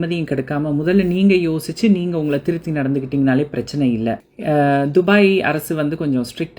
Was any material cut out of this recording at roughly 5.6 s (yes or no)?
no